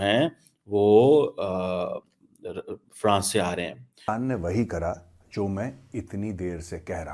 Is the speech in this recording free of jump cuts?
no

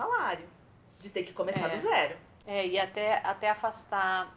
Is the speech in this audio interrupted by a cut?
no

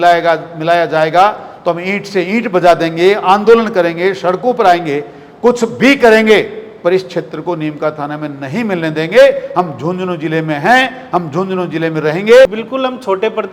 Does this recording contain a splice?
yes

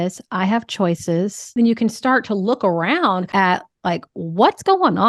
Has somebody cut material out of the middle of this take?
yes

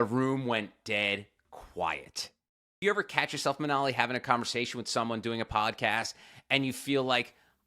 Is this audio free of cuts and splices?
no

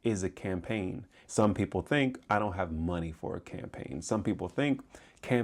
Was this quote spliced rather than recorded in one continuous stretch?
yes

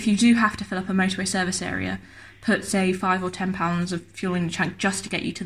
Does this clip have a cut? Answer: no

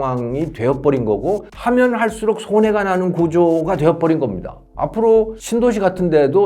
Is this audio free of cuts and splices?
no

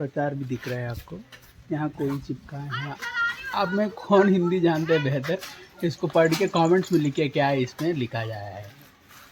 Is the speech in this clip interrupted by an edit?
no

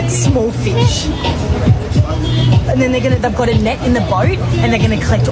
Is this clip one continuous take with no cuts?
yes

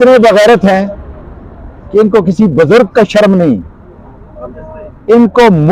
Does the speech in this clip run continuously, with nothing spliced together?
yes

